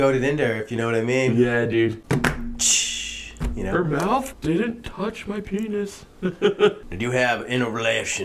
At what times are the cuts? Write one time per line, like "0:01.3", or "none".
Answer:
0:02.0
0:04.3
0:06.9